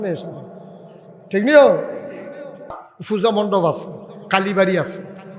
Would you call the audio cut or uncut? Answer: cut